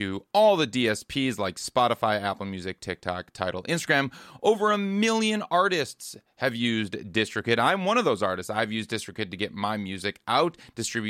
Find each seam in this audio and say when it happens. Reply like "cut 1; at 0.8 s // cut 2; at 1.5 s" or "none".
none